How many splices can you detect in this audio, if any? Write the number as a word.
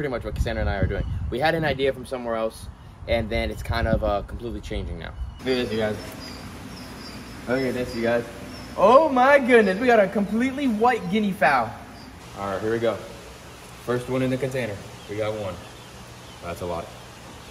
two